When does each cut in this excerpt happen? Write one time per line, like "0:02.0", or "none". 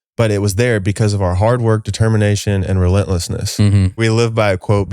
0:04.0